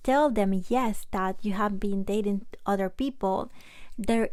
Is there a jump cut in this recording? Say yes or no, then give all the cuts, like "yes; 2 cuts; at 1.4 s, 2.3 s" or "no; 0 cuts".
no; 0 cuts